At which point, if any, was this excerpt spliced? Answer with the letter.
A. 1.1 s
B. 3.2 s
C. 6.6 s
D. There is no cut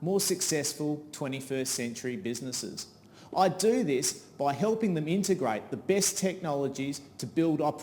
B